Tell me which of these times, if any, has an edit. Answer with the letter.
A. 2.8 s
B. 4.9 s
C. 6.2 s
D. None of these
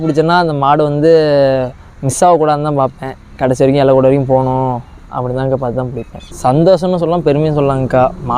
C